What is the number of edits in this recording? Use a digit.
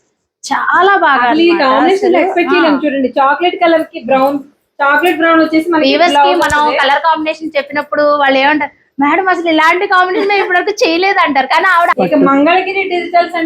1